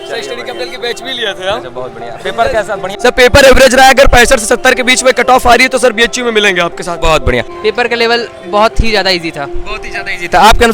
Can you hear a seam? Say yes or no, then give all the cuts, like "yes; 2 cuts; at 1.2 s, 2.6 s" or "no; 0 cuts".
yes; 2 cuts; at 2.9 s, 7.5 s